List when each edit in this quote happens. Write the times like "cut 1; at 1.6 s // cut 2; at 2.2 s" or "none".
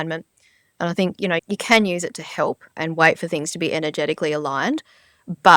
cut 1; at 1.4 s // cut 2; at 2.8 s